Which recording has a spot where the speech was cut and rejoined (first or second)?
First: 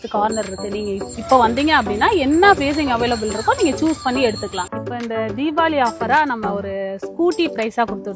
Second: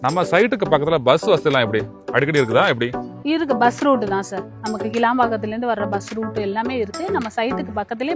first